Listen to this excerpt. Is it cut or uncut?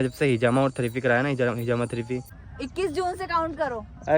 cut